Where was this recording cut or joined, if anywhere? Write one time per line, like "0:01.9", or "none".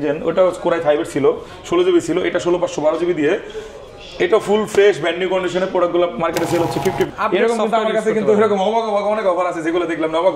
0:07.1